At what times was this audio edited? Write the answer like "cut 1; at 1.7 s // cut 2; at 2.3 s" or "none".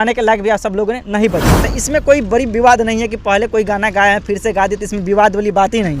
cut 1; at 1.7 s